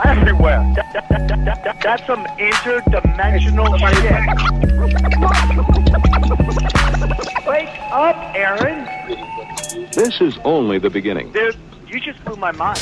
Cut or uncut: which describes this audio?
uncut